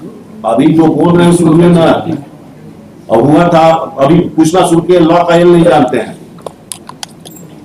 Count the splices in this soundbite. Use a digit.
0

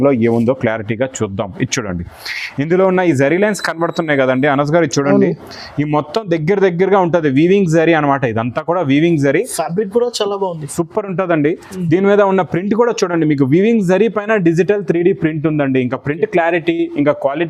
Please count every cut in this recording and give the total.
0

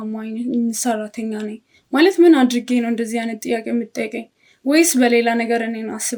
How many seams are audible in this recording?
0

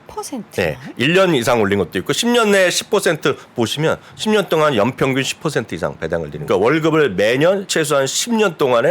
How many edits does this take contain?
2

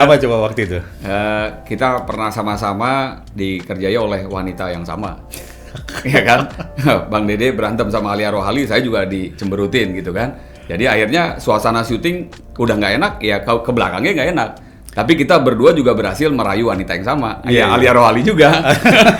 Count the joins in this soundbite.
0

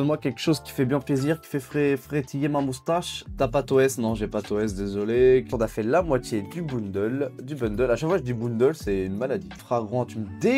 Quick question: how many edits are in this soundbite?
3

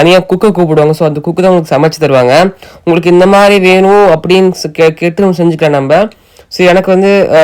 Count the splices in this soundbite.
0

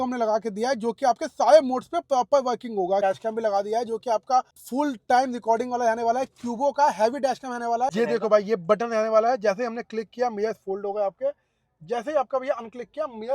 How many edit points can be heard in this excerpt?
3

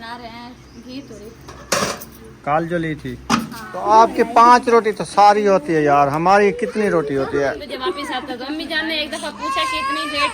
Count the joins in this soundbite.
2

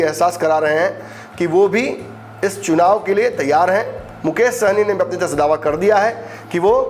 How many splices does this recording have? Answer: 0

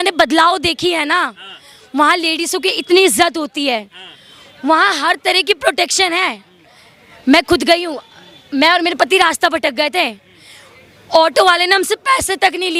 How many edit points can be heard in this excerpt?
0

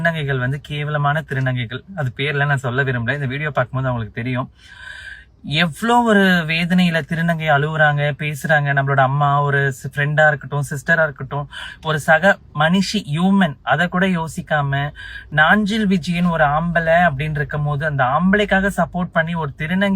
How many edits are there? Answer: 0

